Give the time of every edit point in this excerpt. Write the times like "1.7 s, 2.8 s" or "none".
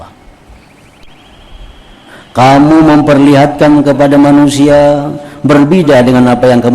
1.0 s